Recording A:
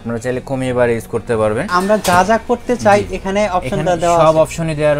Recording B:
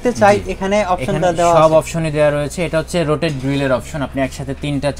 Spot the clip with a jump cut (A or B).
A